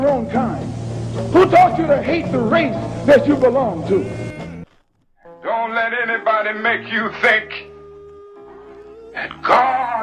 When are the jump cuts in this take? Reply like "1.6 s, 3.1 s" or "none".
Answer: 4.6 s

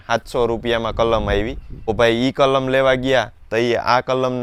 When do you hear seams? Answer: none

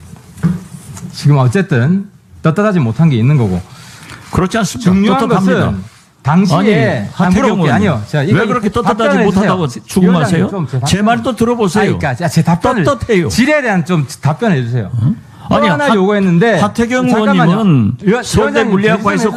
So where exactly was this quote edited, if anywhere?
none

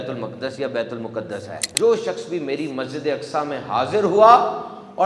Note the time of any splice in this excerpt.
1.7 s

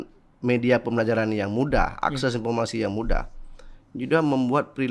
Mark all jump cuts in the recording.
none

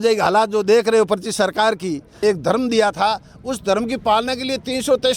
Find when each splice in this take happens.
2.1 s

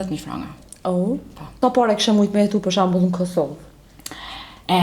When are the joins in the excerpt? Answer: 1.6 s

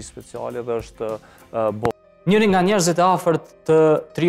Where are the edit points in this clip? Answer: 1.9 s

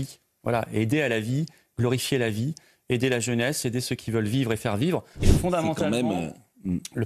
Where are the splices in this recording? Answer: 5.3 s

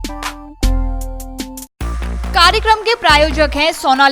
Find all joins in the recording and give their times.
none

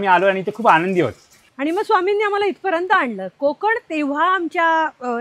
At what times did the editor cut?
1.5 s

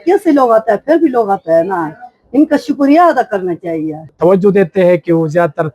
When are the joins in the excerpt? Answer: 4.0 s

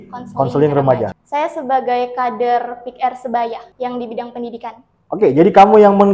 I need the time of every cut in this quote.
1.2 s, 3.7 s

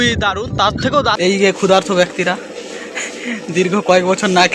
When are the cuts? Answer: 0.9 s

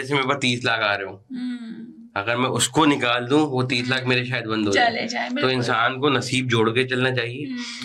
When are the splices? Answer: none

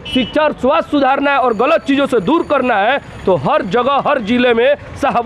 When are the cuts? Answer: none

